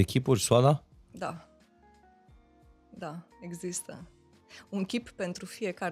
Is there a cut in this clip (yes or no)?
no